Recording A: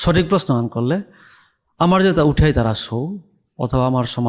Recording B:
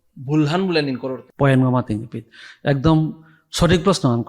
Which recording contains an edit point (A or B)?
B